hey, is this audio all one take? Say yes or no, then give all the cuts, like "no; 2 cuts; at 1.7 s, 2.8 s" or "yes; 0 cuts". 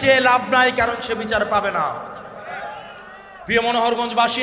yes; 0 cuts